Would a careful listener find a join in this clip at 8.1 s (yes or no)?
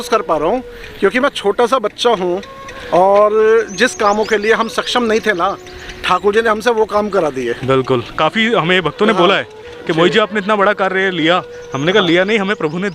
yes